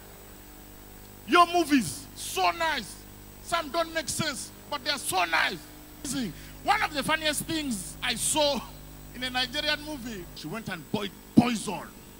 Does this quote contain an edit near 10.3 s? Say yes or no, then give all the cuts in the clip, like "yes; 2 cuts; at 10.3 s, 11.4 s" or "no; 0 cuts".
yes; 2 cuts; at 6.1 s, 10.3 s